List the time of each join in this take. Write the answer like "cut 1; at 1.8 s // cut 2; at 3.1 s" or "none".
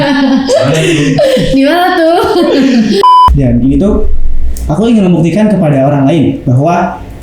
cut 1; at 3.1 s

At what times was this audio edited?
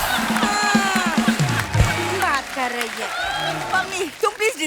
cut 1; at 3.6 s

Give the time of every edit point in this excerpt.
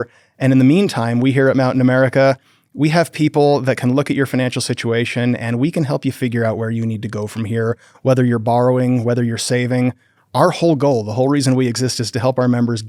none

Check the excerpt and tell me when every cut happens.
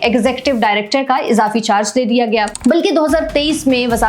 cut 1; at 2.5 s

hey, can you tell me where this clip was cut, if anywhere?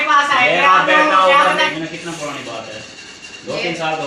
cut 1; at 1.7 s

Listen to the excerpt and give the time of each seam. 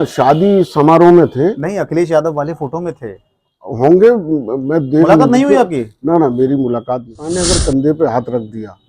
cut 1; at 7.2 s

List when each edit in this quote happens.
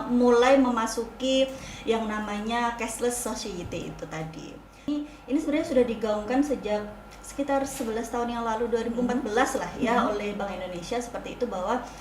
cut 1; at 4.9 s

